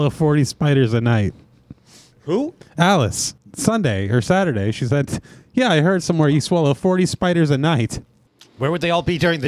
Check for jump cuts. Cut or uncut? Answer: cut